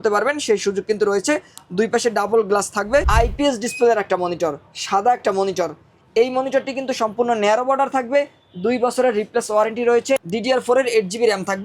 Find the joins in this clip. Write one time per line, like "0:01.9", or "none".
0:03.0
0:10.2